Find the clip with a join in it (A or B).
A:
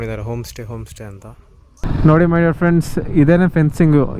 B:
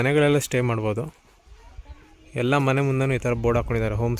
A